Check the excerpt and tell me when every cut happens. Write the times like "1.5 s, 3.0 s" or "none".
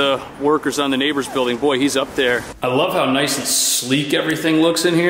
2.5 s